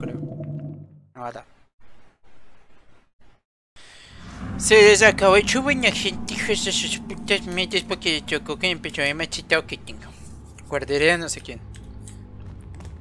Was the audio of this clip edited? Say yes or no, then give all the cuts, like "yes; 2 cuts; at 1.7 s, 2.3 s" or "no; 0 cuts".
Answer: yes; 1 cut; at 3.8 s